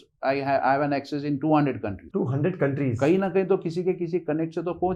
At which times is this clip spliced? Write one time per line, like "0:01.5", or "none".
none